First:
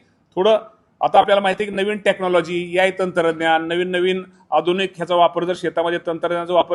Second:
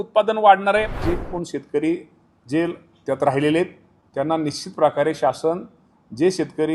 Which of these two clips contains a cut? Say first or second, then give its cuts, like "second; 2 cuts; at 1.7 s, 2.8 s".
second; 1 cut; at 1.0 s